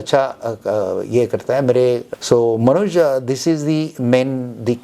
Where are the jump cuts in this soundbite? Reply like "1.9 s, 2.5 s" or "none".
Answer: 2.1 s